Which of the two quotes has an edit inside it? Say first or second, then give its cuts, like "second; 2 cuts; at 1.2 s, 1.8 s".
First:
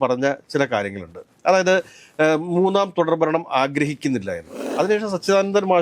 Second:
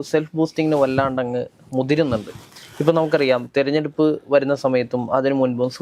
first; 1 cut; at 4.6 s